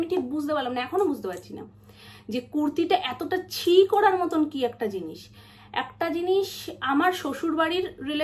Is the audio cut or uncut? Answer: uncut